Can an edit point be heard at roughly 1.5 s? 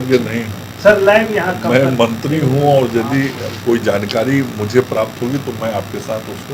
no; 0 cuts

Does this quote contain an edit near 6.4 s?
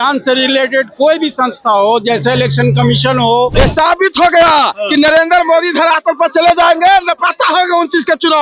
no; 1 cut; at 3.5 s

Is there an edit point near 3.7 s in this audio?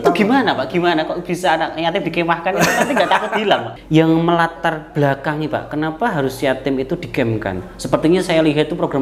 yes; 1 cut; at 3.7 s

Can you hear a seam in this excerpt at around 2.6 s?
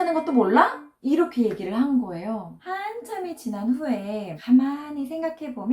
yes; 1 cut; at 2.6 s

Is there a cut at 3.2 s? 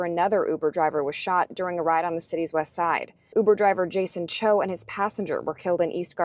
no; 0 cuts

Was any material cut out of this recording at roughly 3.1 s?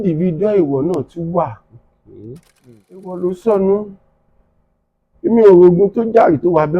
yes; 1 cut; at 3.1 s

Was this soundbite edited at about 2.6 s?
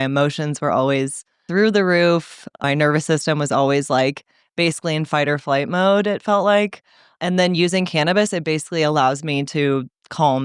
yes; 3 cuts; at 1.4 s, 2.6 s, 7.1 s

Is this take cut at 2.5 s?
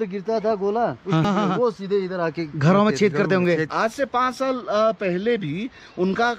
no; 2 cuts; at 1.2 s, 3.7 s

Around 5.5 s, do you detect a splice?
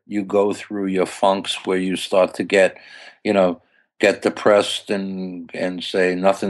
no; 0 cuts

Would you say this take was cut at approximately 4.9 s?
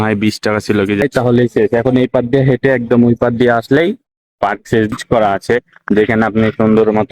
yes; 2 cuts; at 1.0 s, 4.9 s

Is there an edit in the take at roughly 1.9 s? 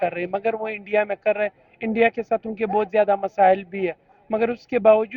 no; 0 cuts

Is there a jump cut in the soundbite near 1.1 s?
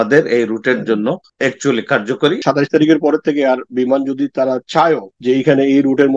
no; 2 cuts; at 2.4 s, 5.1 s

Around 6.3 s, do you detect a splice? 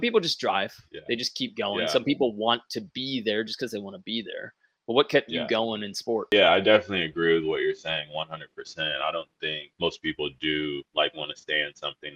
yes; 1 cut; at 6.3 s

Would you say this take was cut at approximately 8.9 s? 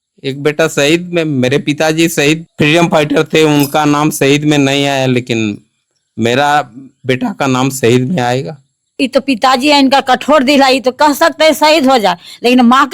yes; 2 cuts; at 2.5 s, 8.9 s

